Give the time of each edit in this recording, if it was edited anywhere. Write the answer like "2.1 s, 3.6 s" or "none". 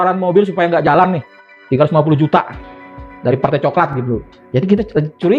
4.3 s